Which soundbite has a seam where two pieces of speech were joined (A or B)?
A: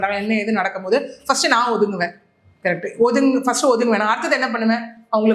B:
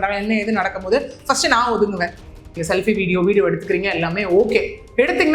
B